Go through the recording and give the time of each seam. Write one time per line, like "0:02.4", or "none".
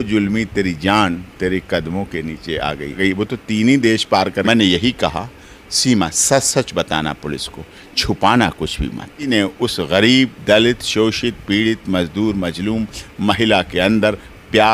0:03.0
0:04.4
0:09.3